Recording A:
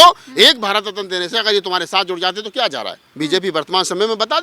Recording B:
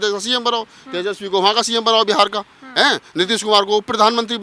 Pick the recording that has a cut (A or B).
A